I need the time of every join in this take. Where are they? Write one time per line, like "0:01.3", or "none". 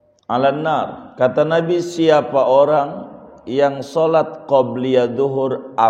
0:01.0